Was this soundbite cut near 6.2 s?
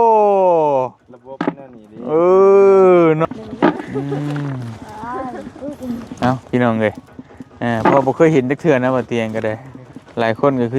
no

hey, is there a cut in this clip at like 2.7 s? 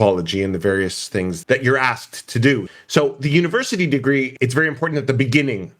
yes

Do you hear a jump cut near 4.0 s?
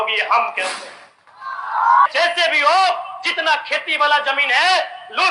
no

